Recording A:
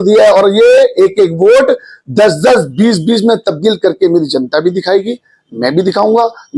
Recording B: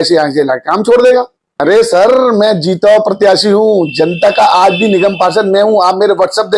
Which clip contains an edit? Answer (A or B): B